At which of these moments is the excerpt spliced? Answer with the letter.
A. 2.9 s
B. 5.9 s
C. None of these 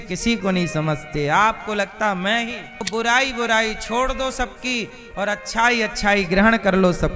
A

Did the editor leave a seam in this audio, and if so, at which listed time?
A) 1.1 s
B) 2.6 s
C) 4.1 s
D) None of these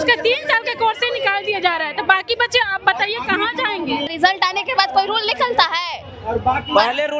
C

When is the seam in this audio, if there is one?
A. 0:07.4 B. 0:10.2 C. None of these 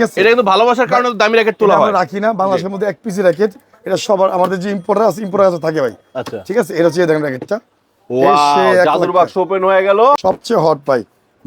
B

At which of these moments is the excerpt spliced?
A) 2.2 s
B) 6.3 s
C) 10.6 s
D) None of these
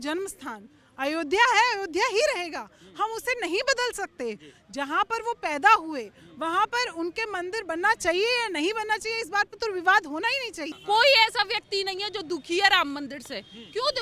C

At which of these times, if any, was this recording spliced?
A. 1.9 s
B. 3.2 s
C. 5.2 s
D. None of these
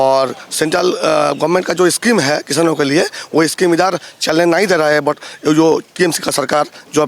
D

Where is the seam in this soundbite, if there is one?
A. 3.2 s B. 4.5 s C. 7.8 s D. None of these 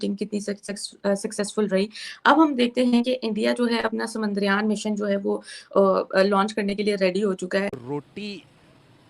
C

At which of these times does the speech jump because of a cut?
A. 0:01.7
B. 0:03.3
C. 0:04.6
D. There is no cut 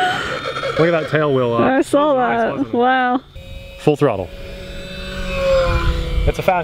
B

